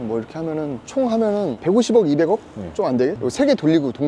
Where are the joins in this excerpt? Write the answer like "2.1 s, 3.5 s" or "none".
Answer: 3.2 s